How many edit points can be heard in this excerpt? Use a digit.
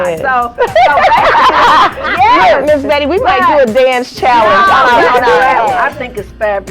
1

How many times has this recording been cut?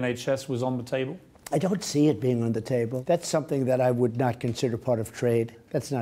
1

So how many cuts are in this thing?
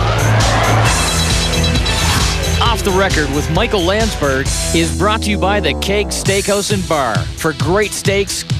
0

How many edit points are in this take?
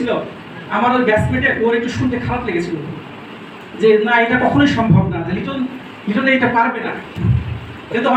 0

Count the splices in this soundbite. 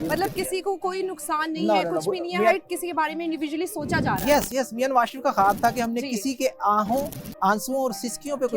0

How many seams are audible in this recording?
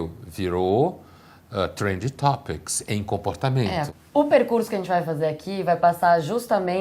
1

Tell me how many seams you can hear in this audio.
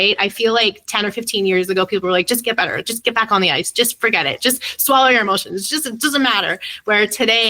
0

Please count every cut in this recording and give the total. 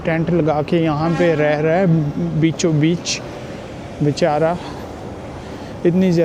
0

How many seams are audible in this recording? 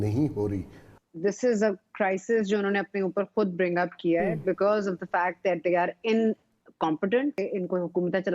2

